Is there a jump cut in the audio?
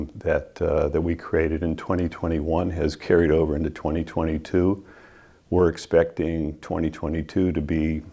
no; 0 cuts

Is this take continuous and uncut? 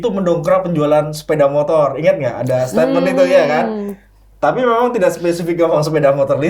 yes; 0 cuts

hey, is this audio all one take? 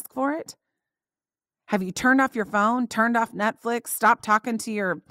yes; 0 cuts

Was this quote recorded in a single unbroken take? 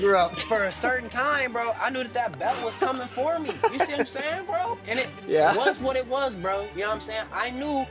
yes; 0 cuts

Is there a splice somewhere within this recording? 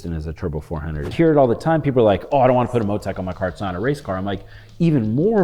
yes; 1 cut; at 1.1 s

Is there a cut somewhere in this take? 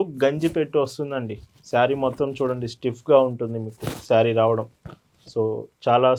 no; 0 cuts

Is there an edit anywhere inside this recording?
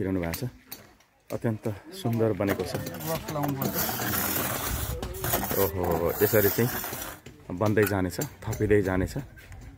yes; 1 cut; at 2.8 s

